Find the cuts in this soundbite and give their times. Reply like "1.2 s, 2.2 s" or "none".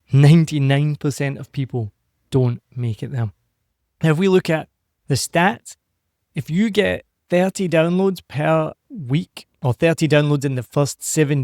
none